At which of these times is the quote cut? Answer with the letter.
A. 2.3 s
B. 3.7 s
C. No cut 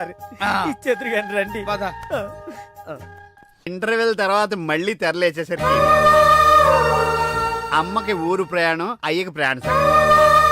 B